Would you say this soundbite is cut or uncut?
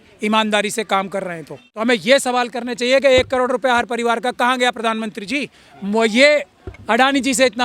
cut